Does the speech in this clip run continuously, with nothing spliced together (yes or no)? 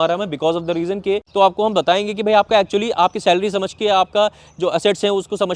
no